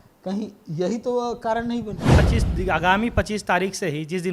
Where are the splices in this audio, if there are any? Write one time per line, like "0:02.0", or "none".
0:02.2